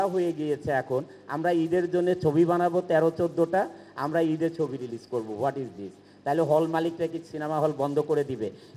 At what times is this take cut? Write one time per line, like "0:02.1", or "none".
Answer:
none